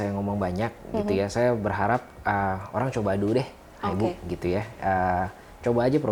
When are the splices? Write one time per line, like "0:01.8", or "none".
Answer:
none